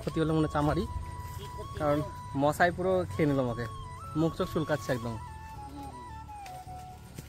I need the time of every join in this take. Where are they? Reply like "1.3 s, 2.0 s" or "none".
none